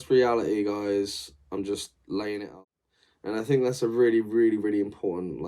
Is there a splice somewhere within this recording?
yes; 1 cut; at 2.5 s

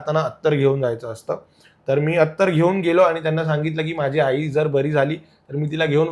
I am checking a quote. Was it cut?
no; 0 cuts

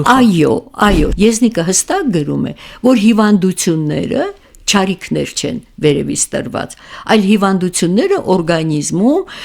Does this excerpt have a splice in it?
yes; 1 cut; at 1.1 s

